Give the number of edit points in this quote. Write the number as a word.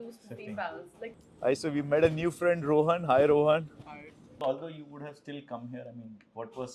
two